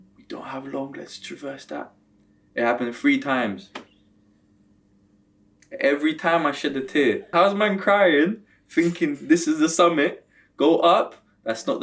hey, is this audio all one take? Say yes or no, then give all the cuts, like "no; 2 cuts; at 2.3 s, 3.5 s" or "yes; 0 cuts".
no; 1 cut; at 7.3 s